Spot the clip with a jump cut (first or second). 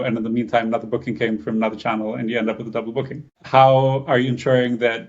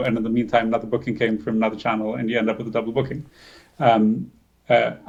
first